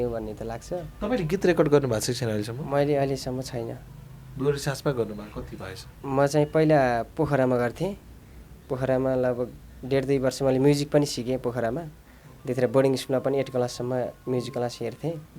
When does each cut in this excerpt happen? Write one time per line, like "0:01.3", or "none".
none